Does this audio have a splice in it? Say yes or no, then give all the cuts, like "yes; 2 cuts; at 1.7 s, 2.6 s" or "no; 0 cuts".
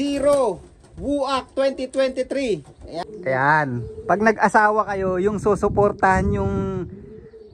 yes; 1 cut; at 3.0 s